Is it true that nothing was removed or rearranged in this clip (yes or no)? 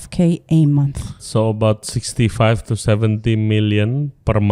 no